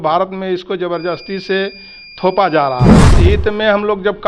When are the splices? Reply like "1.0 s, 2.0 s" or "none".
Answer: 3.1 s